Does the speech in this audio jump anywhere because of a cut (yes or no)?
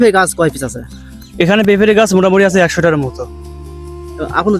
no